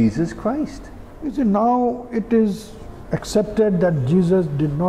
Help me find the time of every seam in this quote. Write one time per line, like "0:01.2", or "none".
0:01.2